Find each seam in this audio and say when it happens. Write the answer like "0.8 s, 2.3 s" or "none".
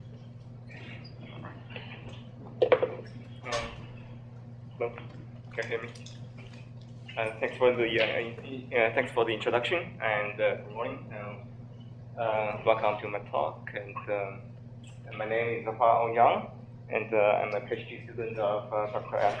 2.8 s